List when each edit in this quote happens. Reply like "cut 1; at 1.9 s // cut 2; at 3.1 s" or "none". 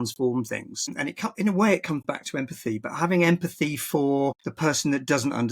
cut 1; at 1.0 s // cut 2; at 4.5 s